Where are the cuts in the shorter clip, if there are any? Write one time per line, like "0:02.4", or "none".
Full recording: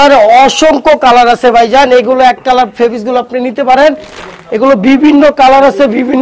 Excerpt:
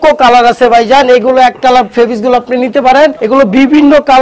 0:03.2